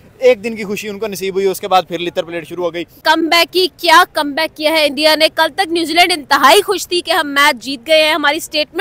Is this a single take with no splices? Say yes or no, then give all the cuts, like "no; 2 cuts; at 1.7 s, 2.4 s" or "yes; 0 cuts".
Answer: yes; 0 cuts